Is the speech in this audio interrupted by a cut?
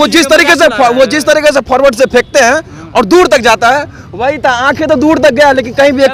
no; 0 cuts

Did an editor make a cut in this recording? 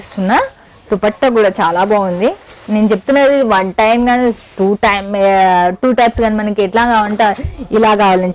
no; 0 cuts

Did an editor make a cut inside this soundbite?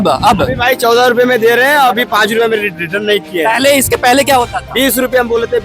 no; 0 cuts

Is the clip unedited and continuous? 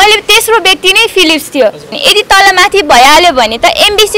no; 1 cut; at 2.0 s

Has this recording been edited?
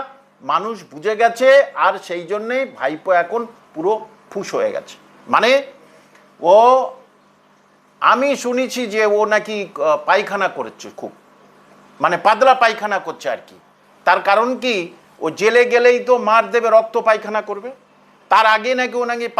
no; 0 cuts

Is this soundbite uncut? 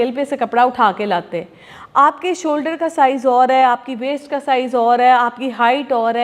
yes; 0 cuts

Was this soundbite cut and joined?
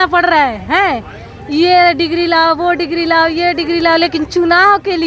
no; 0 cuts

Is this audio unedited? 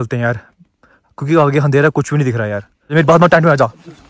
no; 1 cut; at 2.9 s

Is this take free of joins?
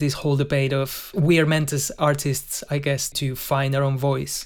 no; 2 cuts; at 1.1 s, 3.1 s

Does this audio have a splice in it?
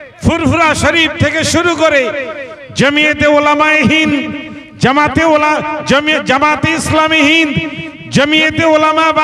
no; 0 cuts

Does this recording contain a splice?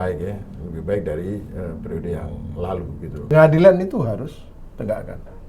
yes; 1 cut; at 3.3 s

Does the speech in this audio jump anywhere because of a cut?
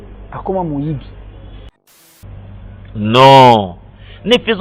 yes; 1 cut; at 2.0 s

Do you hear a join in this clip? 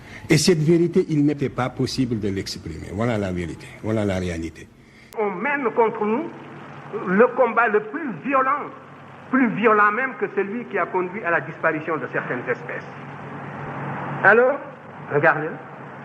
yes; 2 cuts; at 5.1 s, 13.5 s

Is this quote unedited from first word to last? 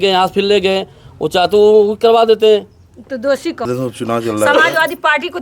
no; 1 cut; at 3.7 s

